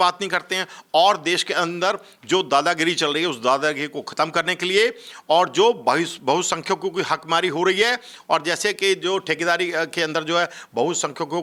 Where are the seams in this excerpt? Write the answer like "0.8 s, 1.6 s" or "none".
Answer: none